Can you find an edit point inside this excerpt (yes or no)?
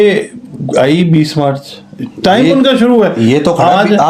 no